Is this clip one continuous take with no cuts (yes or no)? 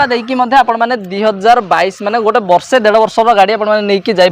yes